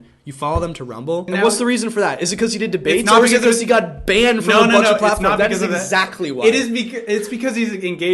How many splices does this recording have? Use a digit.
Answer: 1